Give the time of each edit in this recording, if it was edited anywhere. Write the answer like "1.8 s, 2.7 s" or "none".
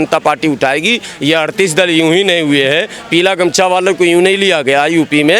none